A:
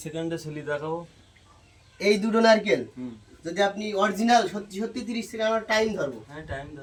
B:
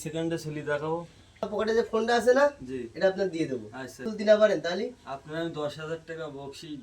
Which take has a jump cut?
B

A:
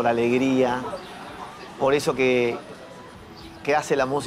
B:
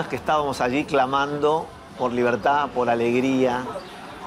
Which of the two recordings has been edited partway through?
B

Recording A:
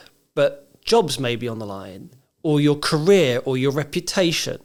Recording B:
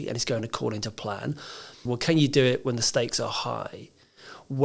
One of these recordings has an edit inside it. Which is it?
B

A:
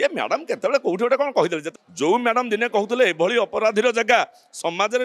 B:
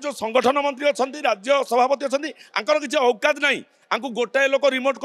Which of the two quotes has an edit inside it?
A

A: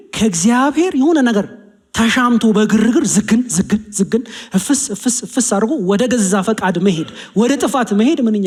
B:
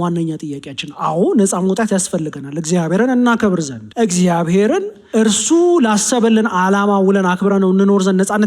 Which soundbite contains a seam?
B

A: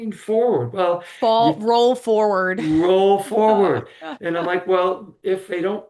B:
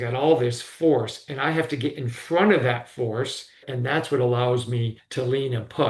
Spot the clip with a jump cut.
B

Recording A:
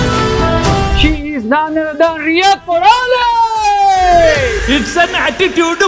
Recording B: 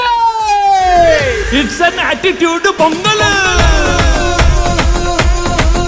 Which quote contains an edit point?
A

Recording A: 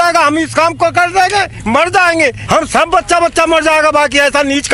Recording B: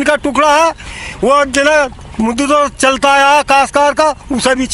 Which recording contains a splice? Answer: A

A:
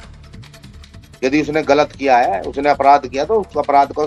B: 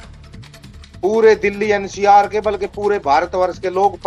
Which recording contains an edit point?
B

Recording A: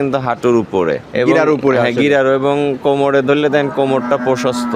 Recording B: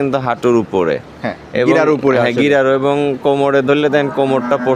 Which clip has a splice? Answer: A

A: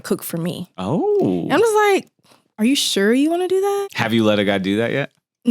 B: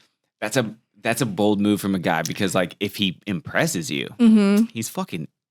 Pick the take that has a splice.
A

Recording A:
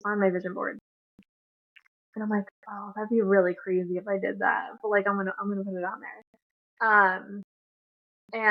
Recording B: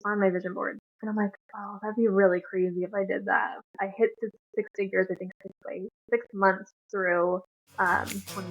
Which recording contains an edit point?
B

